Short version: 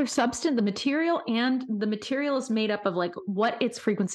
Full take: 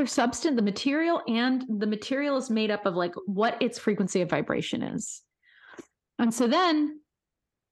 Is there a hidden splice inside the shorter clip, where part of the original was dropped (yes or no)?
no